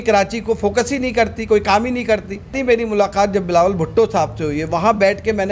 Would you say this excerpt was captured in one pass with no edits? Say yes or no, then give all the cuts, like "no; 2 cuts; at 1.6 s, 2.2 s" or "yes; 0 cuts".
no; 1 cut; at 2.6 s